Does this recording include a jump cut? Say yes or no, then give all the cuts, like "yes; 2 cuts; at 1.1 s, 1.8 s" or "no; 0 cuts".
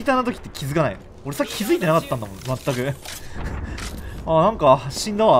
no; 0 cuts